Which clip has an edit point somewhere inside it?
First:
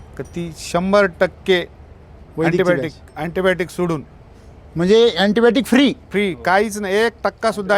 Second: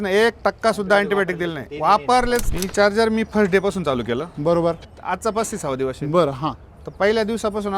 second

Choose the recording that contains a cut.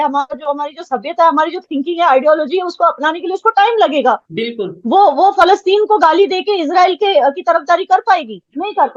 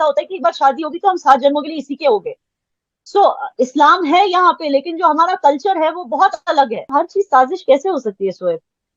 second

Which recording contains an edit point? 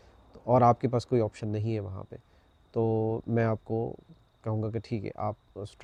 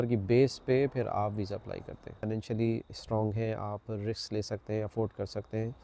second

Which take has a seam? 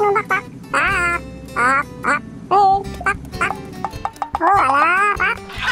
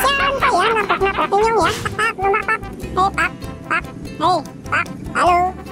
second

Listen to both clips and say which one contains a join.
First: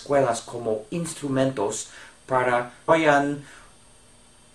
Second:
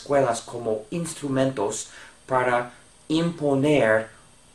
second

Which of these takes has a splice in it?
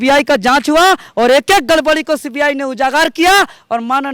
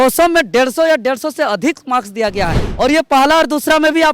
second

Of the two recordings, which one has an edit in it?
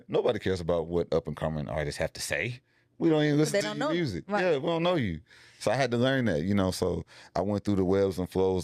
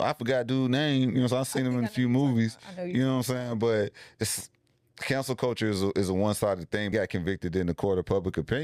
second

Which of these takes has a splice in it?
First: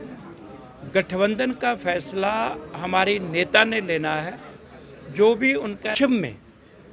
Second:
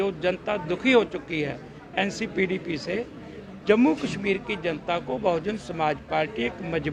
first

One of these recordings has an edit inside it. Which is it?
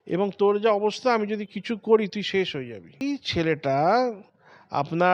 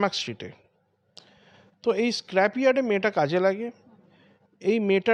first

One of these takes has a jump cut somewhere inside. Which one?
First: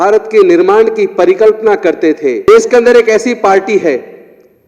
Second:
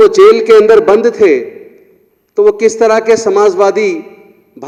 first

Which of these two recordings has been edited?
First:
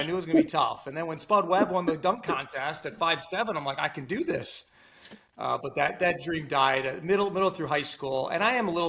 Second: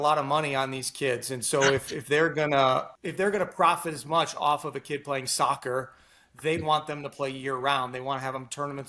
second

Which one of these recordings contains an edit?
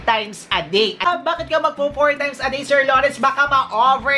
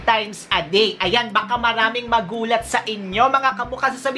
first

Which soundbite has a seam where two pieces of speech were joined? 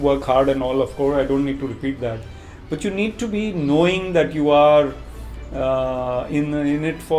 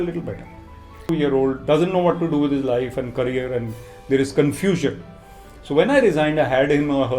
second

